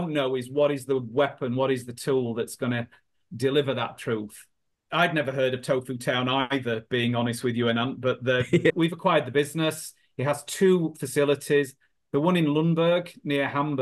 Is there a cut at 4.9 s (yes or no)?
yes